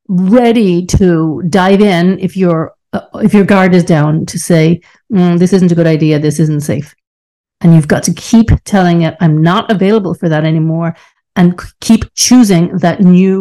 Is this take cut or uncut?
uncut